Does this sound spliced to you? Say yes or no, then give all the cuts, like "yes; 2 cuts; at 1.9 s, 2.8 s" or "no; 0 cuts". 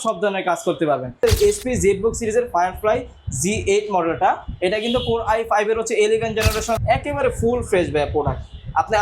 yes; 2 cuts; at 1.2 s, 6.8 s